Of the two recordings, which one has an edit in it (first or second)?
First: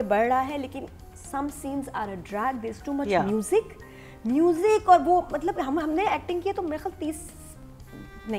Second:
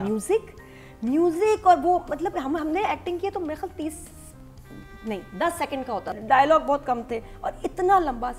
second